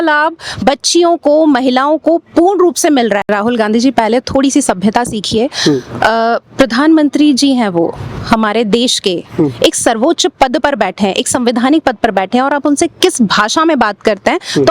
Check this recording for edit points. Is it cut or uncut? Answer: cut